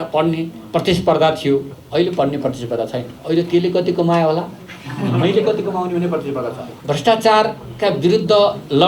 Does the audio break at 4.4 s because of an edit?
no; 3 cuts; at 1.8 s, 3.1 s, 6.7 s

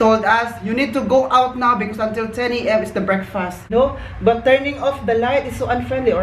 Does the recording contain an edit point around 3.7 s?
yes; 1 cut; at 3.7 s

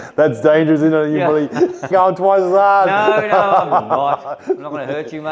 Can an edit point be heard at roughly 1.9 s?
yes; 1 cut; at 1.9 s

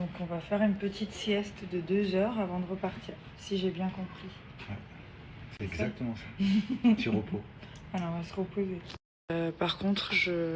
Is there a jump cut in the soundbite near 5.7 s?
yes; 1 cut; at 5.7 s

